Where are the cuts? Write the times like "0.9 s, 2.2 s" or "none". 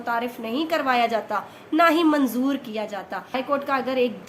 3.4 s